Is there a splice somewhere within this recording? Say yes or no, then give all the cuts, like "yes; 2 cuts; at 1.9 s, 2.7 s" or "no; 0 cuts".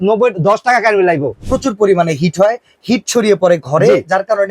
yes; 1 cut; at 1.5 s